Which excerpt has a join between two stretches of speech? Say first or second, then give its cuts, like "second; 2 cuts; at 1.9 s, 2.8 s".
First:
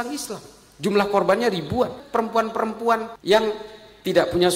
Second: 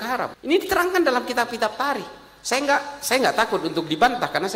first; 1 cut; at 2.0 s